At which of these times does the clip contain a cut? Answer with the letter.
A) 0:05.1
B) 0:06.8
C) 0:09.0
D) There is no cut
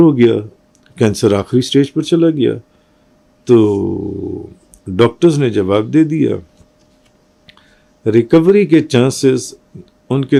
D